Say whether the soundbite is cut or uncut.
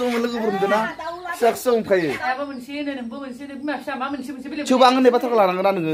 cut